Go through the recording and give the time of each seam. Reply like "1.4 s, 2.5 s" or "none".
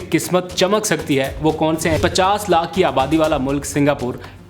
2.0 s